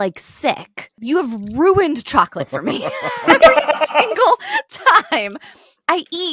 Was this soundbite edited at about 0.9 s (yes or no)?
yes